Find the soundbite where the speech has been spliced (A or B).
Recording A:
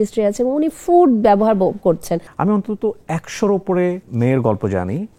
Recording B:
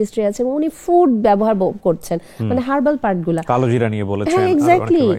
A